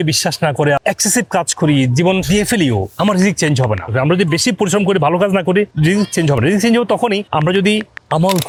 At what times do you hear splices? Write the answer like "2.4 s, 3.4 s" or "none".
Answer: none